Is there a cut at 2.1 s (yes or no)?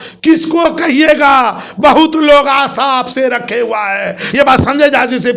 no